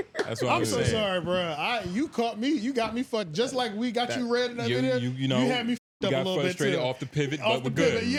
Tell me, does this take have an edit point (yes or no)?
no